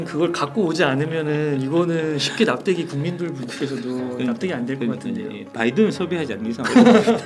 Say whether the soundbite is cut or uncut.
uncut